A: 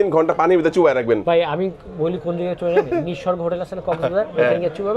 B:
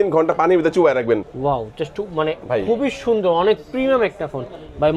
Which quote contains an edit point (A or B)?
B